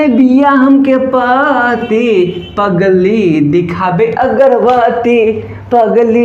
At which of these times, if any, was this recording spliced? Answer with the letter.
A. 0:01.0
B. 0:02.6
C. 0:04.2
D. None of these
D